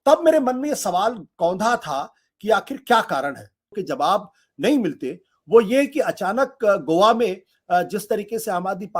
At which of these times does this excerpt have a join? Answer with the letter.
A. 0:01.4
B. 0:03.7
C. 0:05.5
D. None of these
B